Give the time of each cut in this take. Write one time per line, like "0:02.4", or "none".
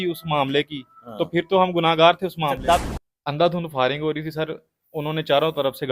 0:02.8